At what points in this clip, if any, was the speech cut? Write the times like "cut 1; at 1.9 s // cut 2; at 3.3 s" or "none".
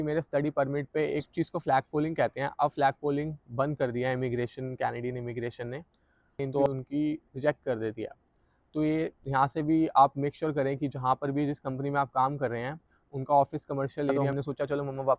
cut 1; at 1.3 s // cut 2; at 6.7 s // cut 3; at 14.2 s